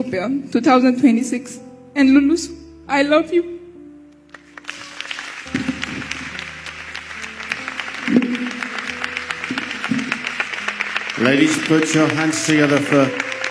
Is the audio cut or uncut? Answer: uncut